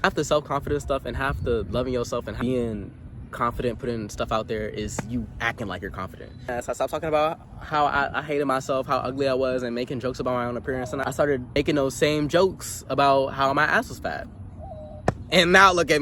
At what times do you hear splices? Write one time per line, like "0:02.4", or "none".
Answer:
0:02.3
0:06.5
0:11.6

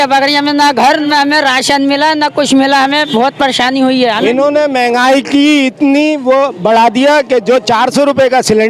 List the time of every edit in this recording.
0:01.1
0:04.2

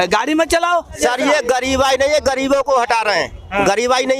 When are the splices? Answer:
0:01.0

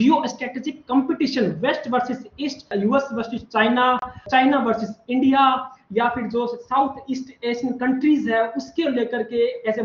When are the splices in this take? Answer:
0:02.7
0:04.3

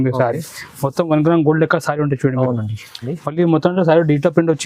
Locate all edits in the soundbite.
0:03.1

